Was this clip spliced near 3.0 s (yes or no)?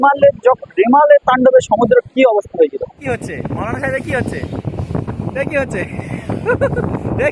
yes